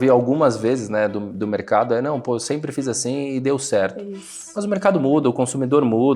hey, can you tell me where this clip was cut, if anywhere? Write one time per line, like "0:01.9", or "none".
none